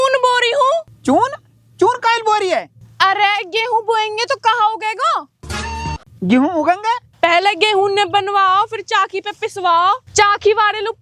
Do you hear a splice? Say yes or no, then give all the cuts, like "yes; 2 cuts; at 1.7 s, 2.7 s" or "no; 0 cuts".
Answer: yes; 2 cuts; at 0.9 s, 7.1 s